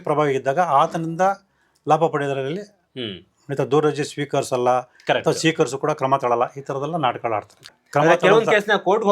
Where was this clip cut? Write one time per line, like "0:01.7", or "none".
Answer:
0:07.8